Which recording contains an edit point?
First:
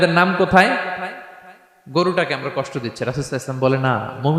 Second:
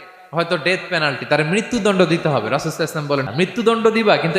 second; 1 cut; at 3.3 s

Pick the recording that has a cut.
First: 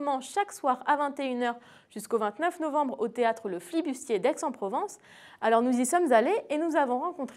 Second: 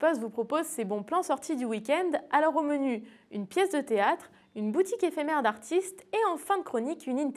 first; 1 cut; at 5.8 s

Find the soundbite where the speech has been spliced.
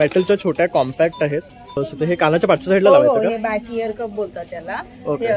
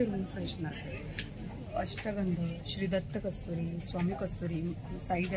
first; 1 cut; at 1.8 s

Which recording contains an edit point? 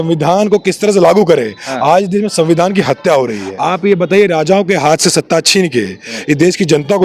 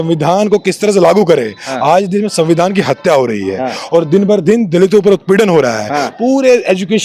first; 1 cut; at 3.5 s

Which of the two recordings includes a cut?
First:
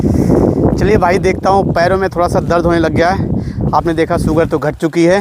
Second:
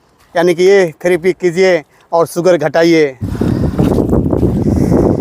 second; 1 cut; at 3.2 s

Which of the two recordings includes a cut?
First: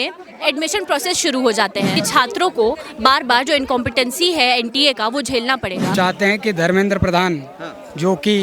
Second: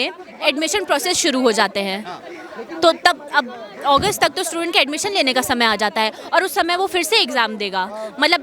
first; 2 cuts; at 1.9 s, 5.9 s

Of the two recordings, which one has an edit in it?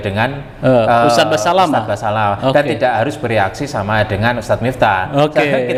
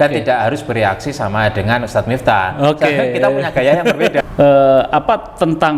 second; 1 cut; at 4.2 s

